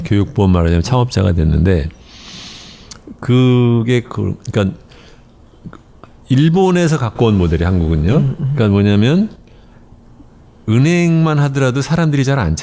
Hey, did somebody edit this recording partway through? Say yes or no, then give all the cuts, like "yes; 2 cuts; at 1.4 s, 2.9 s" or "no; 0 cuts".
yes; 1 cut; at 4.4 s